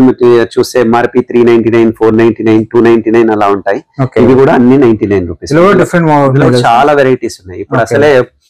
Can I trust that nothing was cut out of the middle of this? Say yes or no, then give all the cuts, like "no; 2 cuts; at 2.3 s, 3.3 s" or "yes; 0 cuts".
yes; 0 cuts